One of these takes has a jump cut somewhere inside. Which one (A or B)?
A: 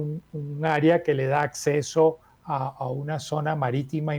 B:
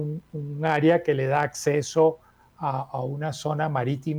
A